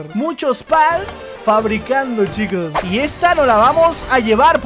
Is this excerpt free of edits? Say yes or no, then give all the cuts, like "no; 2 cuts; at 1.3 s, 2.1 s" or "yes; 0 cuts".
no; 1 cut; at 2.7 s